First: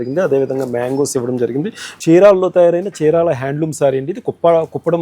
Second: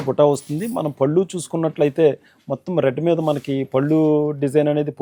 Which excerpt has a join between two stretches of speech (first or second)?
first